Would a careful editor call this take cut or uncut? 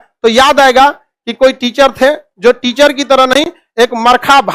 uncut